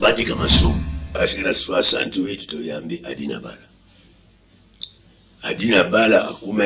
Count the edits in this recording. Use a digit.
1